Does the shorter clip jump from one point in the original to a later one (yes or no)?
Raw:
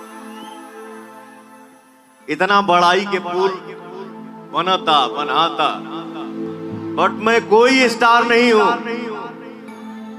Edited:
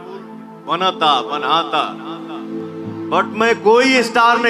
no